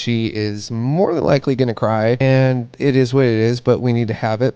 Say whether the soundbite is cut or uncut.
cut